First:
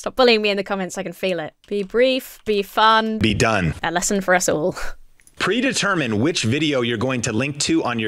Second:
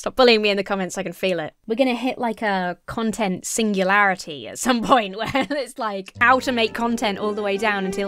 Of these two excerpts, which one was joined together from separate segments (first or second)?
second